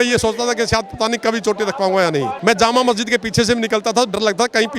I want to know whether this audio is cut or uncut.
cut